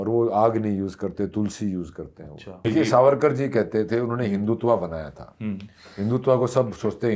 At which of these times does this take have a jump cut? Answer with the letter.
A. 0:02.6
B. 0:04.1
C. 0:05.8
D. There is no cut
A